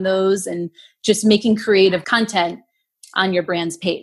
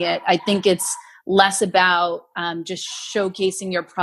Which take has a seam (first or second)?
first